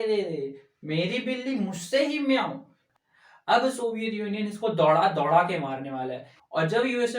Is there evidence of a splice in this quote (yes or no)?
yes